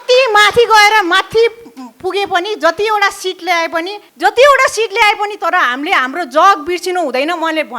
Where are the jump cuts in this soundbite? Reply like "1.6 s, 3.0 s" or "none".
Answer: 4.0 s

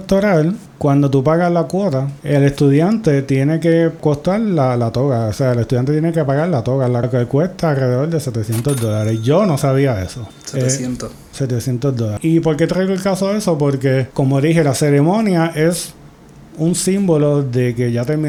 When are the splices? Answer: none

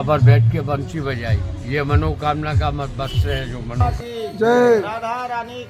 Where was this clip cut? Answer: 3.9 s

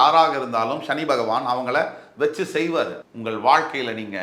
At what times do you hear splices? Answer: 3.0 s

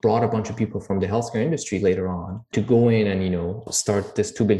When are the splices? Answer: 2.5 s, 3.6 s

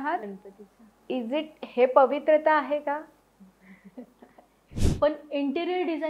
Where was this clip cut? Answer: 4.7 s

